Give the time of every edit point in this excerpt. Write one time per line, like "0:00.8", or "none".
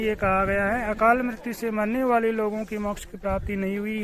none